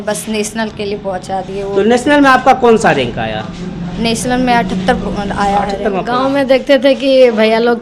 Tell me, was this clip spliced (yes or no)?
yes